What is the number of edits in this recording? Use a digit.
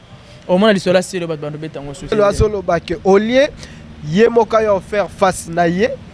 1